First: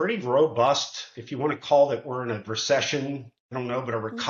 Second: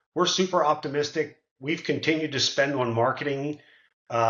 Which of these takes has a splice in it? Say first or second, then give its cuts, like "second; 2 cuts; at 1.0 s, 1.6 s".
first; 1 cut; at 3.4 s